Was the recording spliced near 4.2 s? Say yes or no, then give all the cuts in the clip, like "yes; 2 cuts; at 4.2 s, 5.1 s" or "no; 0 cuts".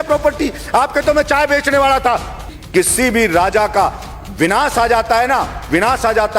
no; 1 cut; at 2.5 s